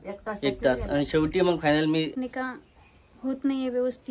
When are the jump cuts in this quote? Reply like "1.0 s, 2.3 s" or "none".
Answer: 2.2 s